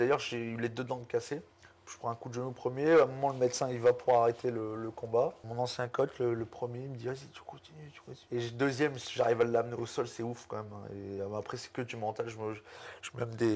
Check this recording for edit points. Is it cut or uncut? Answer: cut